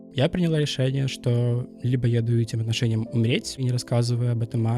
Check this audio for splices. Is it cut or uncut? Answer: cut